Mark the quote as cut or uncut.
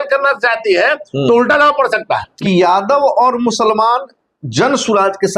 cut